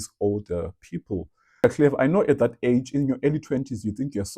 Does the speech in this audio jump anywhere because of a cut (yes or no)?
yes